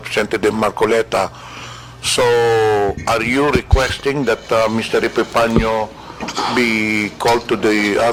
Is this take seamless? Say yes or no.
yes